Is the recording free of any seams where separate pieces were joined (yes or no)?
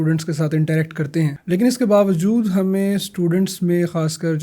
no